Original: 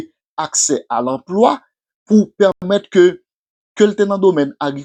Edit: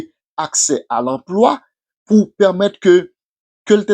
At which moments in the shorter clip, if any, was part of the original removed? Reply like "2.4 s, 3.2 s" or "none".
2.6 s